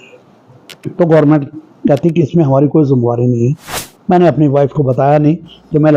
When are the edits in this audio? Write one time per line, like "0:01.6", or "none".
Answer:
0:03.8